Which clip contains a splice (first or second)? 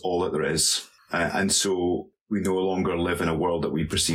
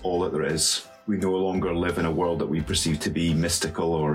second